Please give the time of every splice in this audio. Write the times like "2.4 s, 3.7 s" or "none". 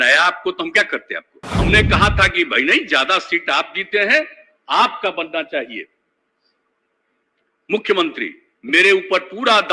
1.4 s